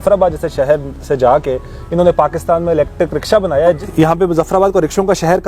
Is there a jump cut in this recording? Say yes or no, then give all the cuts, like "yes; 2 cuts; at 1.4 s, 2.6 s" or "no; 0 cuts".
yes; 1 cut; at 3.8 s